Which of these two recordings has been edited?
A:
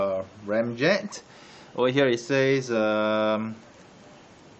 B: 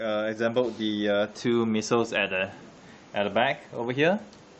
A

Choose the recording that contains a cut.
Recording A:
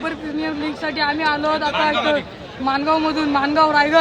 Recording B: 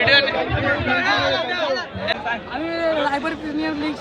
B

